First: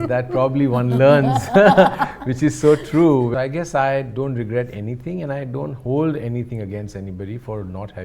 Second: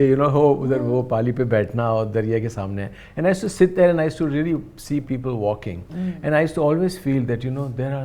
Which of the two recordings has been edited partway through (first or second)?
first